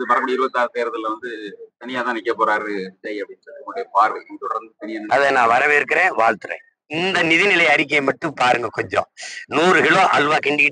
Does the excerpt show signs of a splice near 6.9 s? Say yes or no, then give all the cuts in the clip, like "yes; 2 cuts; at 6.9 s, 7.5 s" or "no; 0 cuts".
yes; 1 cut; at 6.9 s